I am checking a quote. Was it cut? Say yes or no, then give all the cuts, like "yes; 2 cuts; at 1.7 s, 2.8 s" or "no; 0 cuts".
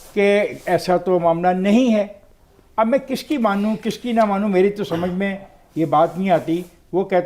no; 0 cuts